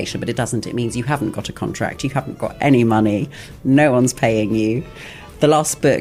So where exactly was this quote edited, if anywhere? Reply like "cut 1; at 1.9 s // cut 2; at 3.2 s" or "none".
none